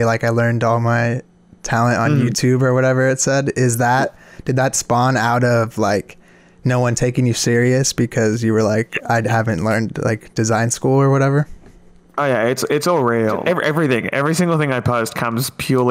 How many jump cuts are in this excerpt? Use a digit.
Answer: 1